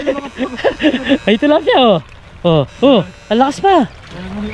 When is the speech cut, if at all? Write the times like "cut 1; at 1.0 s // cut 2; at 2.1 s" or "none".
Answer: none